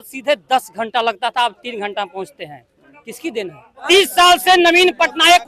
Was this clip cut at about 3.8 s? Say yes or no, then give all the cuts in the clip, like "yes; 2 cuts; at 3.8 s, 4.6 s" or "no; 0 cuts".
yes; 1 cut; at 3.8 s